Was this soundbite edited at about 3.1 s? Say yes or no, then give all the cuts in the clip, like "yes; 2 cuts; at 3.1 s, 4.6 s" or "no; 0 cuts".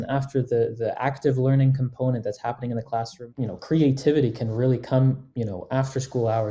yes; 1 cut; at 3.1 s